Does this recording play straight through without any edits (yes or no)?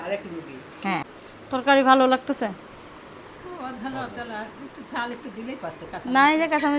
no